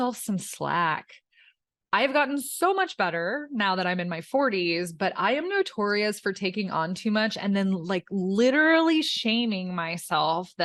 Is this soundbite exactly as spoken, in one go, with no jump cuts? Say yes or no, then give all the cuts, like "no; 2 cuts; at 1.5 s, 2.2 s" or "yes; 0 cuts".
yes; 0 cuts